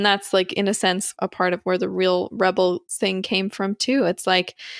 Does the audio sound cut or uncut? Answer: cut